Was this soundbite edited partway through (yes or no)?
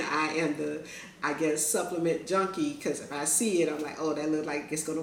no